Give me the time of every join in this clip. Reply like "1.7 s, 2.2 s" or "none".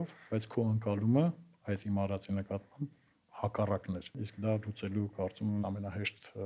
4.2 s, 5.6 s